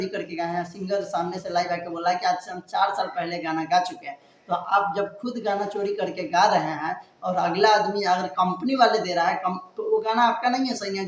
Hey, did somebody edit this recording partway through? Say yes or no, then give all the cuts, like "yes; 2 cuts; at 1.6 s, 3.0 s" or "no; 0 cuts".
no; 0 cuts